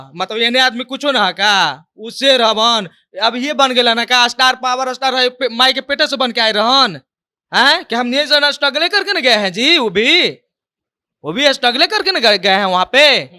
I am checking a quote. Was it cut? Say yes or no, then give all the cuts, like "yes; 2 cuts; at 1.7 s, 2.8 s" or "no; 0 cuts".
no; 0 cuts